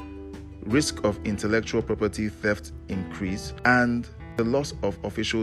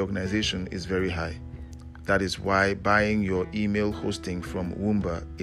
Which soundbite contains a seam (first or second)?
first